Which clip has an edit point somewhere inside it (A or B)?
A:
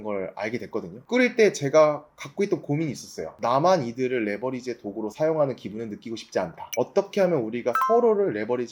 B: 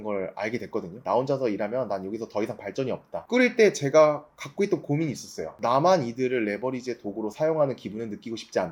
A